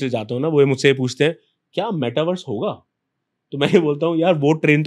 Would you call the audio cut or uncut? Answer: uncut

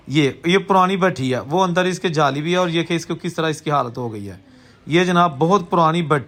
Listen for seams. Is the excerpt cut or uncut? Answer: uncut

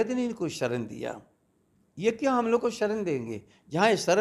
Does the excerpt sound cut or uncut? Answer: uncut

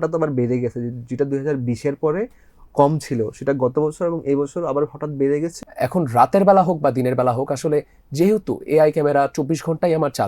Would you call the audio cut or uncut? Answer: cut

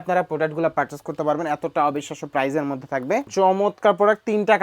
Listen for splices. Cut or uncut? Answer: cut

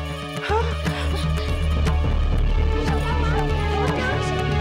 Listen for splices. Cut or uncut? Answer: uncut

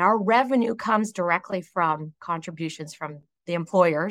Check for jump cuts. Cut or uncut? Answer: uncut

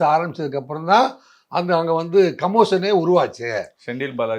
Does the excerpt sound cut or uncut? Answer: uncut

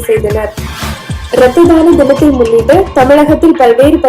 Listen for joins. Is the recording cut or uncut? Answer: cut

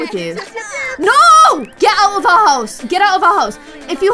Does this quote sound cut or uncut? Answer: cut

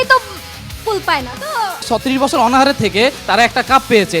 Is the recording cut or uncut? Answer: cut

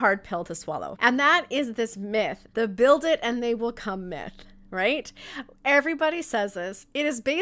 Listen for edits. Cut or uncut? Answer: cut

